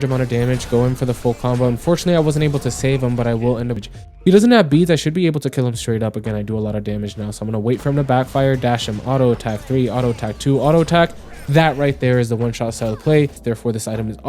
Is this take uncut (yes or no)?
no